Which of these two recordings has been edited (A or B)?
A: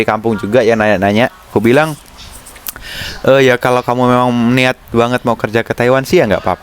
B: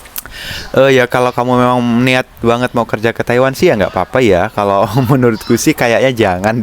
A